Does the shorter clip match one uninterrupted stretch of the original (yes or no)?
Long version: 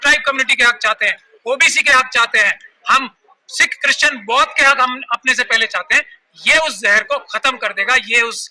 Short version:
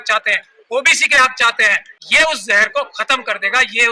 no